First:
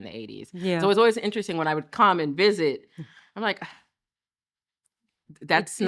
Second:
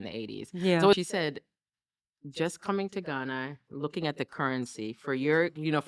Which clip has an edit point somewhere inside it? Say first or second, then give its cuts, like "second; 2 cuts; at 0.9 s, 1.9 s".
second; 1 cut; at 0.9 s